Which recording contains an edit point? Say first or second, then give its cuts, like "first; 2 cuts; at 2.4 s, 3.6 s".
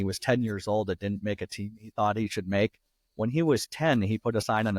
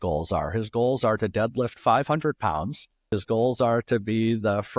second; 1 cut; at 3.2 s